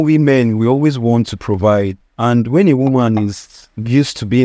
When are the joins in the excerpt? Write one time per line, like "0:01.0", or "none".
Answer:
0:02.0